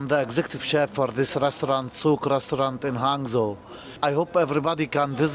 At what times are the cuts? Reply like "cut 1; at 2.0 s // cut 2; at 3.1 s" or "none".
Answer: cut 1; at 3.9 s